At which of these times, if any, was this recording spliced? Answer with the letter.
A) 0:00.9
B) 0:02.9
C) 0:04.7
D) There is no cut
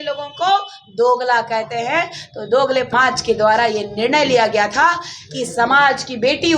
B